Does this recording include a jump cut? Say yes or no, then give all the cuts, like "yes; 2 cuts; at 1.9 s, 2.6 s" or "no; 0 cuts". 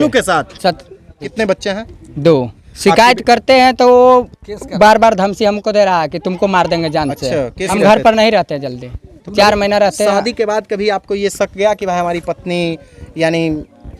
yes; 3 cuts; at 1.3 s, 2.7 s, 7.7 s